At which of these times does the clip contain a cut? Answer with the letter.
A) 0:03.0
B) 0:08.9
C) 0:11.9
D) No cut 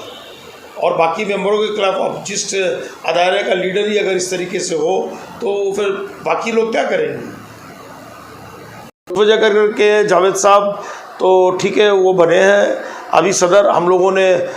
B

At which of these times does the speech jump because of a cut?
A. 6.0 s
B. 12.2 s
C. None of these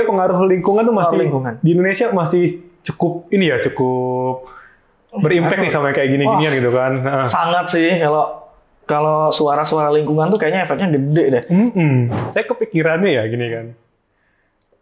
B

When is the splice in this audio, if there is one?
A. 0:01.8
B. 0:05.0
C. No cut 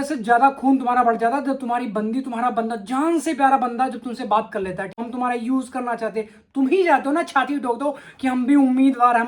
B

